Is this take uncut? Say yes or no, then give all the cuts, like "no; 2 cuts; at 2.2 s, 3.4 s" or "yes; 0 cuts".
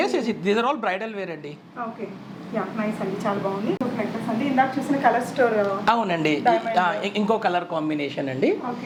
yes; 0 cuts